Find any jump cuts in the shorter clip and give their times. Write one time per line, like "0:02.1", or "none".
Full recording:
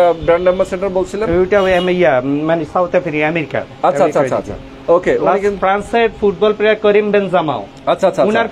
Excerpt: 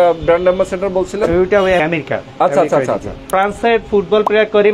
0:01.8
0:03.3